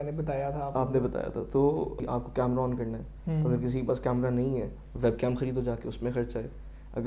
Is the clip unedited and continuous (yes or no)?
no